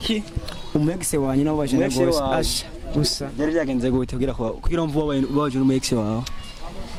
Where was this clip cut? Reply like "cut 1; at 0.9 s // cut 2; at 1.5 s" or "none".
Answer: none